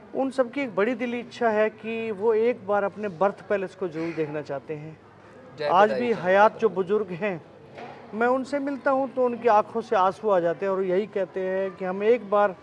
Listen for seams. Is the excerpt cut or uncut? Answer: uncut